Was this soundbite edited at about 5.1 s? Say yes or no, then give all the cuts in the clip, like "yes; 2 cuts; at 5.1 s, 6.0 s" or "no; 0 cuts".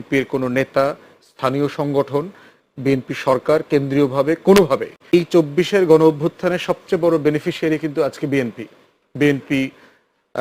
yes; 1 cut; at 5.1 s